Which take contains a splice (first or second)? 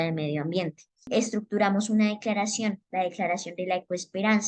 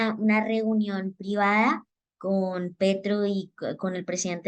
first